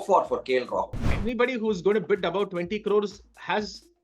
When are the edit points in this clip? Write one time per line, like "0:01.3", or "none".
0:01.0